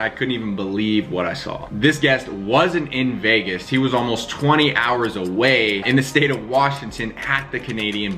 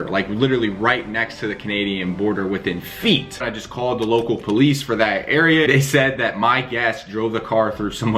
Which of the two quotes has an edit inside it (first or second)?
second